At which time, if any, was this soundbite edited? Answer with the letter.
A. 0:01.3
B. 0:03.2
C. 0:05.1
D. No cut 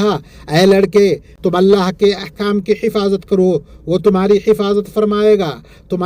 A